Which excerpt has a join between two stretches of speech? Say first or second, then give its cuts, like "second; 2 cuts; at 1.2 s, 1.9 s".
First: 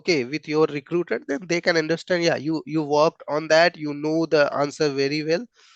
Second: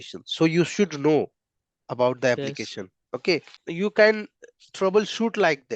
second; 1 cut; at 3.6 s